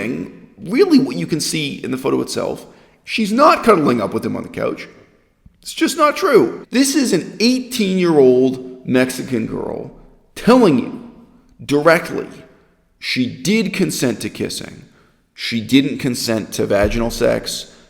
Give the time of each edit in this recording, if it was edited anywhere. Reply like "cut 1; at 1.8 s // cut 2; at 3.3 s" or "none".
cut 1; at 6.6 s